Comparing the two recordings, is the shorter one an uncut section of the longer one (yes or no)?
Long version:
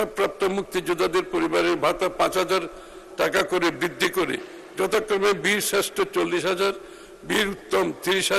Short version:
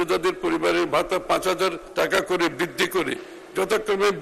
no